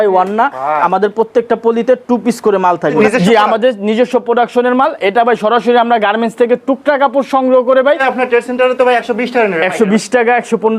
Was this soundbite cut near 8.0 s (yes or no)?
yes